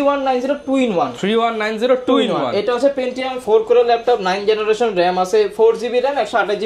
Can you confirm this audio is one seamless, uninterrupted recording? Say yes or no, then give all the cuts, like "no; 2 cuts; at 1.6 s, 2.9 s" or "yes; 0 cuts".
yes; 0 cuts